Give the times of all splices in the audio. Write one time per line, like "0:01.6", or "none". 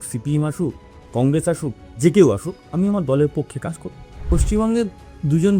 0:00.9
0:04.1